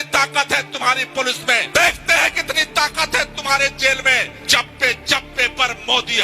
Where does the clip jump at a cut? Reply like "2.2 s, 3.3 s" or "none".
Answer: 1.7 s, 4.4 s